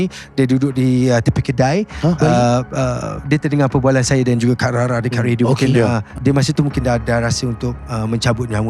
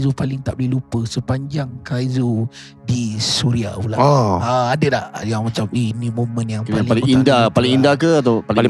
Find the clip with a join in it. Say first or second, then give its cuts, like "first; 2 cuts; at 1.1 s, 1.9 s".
first; 1 cut; at 6.1 s